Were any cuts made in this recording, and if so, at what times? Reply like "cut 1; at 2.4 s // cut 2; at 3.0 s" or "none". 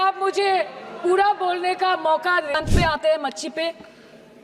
cut 1; at 2.6 s